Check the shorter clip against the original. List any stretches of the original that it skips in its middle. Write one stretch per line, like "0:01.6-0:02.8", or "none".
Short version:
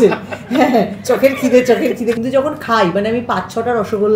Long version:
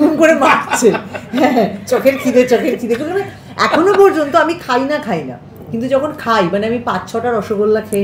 0:03.0-0:05.8